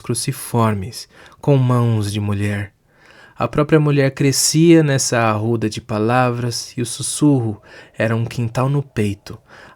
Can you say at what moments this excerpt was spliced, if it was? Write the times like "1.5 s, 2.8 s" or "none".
none

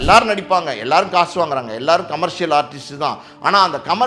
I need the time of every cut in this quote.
none

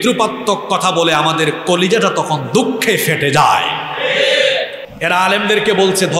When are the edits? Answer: 4.8 s

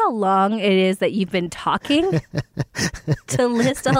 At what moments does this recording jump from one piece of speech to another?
none

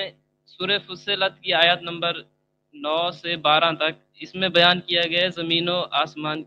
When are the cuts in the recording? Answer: none

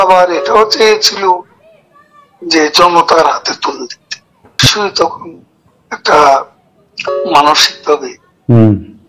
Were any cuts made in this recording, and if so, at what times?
4.6 s

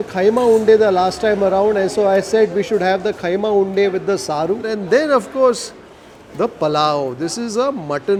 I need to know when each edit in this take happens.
none

